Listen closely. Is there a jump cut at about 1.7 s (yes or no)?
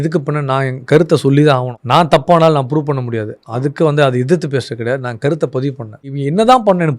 yes